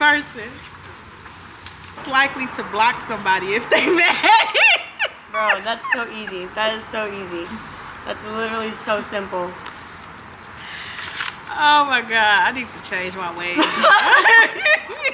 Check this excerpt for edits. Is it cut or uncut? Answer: cut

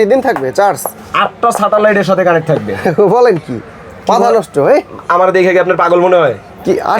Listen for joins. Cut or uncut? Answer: uncut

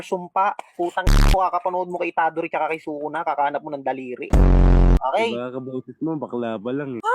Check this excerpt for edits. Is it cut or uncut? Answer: cut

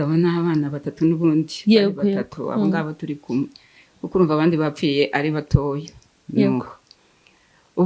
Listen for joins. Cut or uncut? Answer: uncut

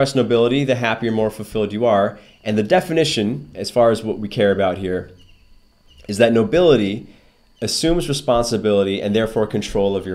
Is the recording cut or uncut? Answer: uncut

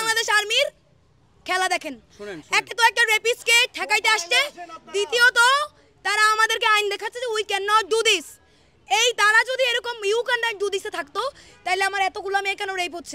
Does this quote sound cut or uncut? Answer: uncut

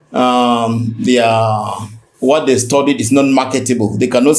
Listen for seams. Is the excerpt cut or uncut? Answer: uncut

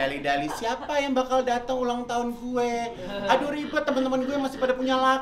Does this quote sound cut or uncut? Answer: uncut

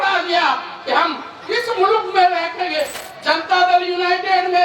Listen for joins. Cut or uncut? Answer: cut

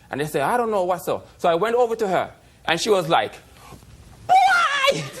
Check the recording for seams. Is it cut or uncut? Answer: cut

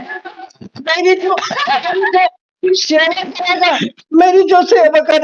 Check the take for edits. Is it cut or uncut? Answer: uncut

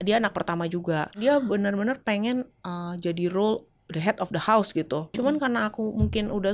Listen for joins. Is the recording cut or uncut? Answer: cut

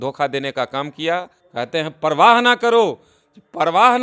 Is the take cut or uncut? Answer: cut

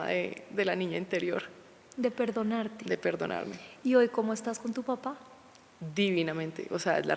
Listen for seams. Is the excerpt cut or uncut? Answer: uncut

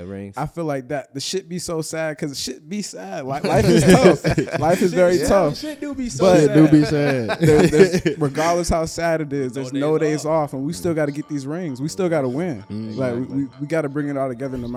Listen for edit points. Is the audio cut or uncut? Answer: uncut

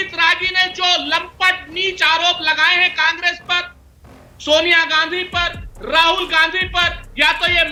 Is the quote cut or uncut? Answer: uncut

